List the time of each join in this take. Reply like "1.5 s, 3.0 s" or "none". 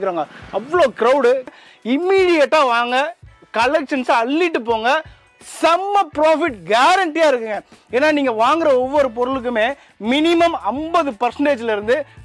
1.6 s